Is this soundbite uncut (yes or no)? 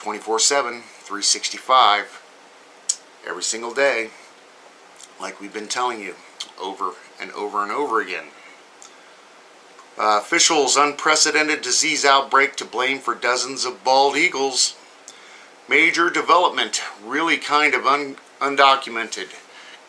no